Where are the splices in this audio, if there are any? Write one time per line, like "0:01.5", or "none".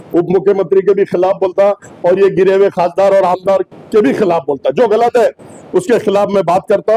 none